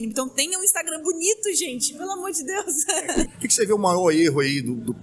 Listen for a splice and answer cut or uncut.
cut